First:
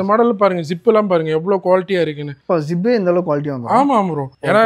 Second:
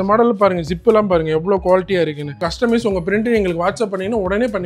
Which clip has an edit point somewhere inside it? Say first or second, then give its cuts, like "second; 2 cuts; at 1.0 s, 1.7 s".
second; 1 cut; at 2.4 s